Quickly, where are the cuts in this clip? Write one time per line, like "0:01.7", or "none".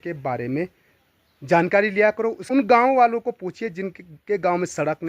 0:02.4